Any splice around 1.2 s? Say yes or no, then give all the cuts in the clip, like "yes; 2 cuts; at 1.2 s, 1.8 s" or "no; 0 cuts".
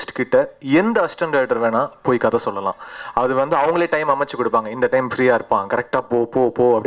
no; 0 cuts